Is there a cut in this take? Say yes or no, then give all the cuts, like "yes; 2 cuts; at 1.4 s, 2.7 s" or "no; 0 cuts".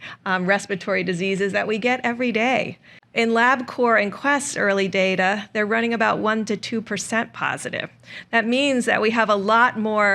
no; 0 cuts